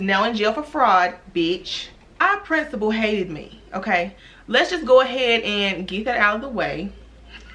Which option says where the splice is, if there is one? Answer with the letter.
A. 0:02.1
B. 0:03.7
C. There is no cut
A